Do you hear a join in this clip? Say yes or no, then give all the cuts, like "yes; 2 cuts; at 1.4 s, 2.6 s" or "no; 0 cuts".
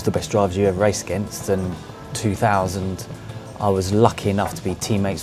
no; 0 cuts